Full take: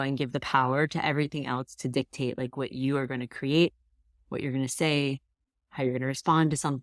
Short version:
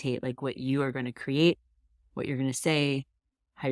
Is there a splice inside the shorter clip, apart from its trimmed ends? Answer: no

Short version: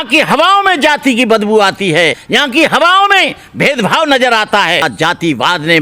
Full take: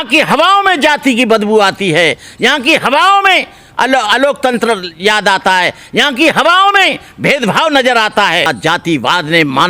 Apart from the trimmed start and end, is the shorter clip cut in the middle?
yes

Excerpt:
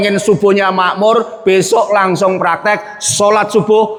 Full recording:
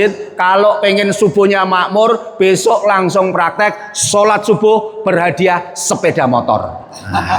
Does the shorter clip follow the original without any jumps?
yes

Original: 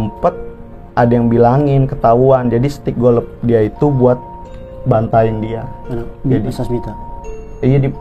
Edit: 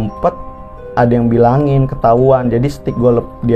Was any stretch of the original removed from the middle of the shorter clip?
no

